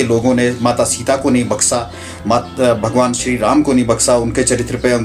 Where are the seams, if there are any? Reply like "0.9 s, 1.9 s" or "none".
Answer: none